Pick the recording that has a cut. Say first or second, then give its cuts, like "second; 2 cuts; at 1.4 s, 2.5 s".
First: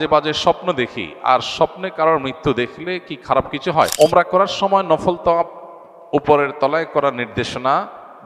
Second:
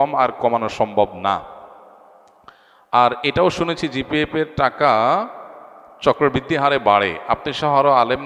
first; 1 cut; at 3.9 s